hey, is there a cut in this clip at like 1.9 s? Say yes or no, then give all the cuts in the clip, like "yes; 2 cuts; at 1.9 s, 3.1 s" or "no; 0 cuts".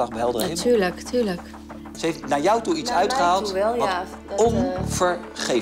yes; 1 cut; at 1.9 s